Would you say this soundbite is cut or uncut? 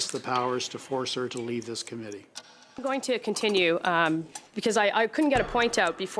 cut